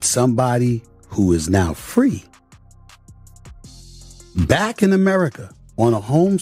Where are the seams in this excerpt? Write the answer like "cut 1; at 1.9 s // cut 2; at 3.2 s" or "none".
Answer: none